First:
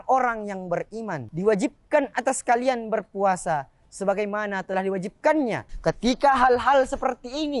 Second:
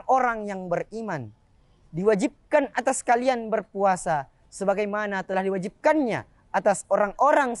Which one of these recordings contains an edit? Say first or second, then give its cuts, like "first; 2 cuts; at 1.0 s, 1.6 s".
first; 2 cuts; at 1.2 s, 5.7 s